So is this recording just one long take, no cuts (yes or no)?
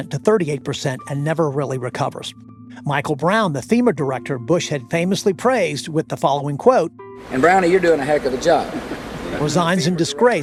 yes